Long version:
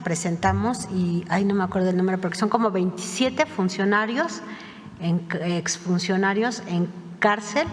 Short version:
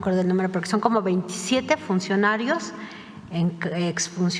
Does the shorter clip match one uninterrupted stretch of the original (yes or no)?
yes